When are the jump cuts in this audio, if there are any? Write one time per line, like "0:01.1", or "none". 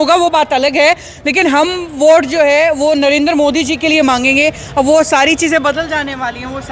none